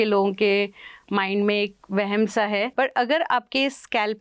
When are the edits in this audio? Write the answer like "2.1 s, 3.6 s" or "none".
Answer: 2.7 s

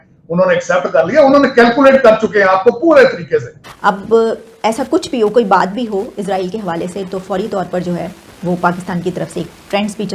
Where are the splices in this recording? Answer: 3.6 s

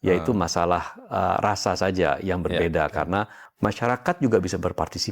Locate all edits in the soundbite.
3.4 s

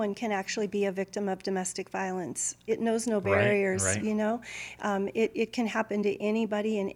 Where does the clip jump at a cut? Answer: 2.5 s

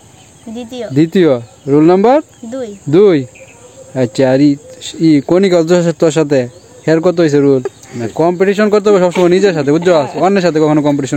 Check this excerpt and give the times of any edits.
7.7 s

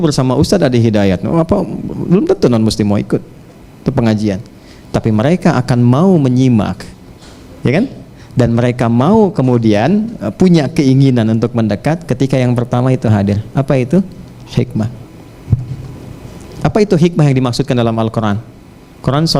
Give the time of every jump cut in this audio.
none

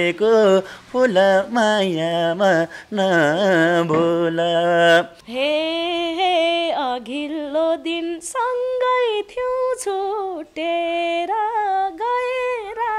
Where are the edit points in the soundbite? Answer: 5.2 s

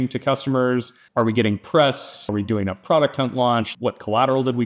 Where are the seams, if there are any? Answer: 1.0 s, 2.3 s, 3.7 s

